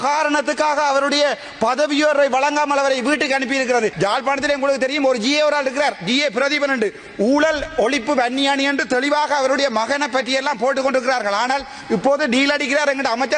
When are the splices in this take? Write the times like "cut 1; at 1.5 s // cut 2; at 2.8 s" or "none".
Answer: cut 1; at 3.9 s